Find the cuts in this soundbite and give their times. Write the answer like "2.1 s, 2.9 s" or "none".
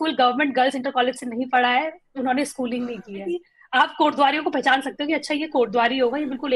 3.5 s